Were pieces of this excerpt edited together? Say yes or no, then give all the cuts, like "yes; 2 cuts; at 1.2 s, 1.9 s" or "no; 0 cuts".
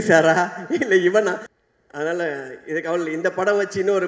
yes; 1 cut; at 1.5 s